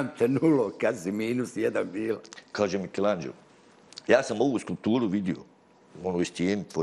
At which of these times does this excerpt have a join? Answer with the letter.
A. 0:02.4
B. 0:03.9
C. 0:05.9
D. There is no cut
A